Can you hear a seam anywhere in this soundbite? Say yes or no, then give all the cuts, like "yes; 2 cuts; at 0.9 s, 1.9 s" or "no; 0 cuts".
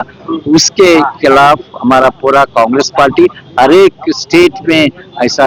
no; 0 cuts